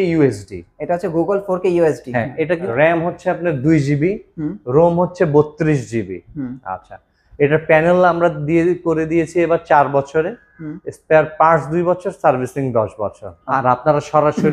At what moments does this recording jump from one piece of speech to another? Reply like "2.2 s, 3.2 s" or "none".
2.7 s, 13.3 s

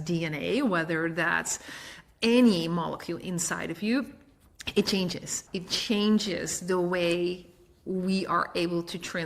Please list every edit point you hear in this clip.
5.3 s

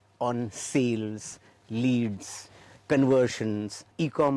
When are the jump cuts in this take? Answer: none

